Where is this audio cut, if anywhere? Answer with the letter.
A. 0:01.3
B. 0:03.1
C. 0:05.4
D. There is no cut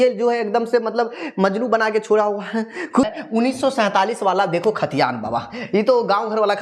B